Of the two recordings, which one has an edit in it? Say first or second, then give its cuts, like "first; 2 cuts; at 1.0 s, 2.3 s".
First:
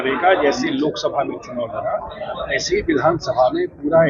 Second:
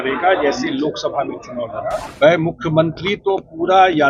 second; 1 cut; at 2.1 s